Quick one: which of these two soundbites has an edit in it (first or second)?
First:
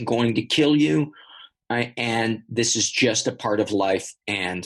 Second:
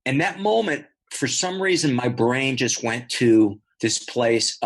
second